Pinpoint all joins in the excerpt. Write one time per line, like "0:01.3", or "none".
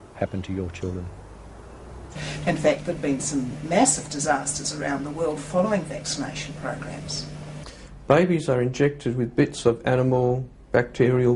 0:02.2
0:07.6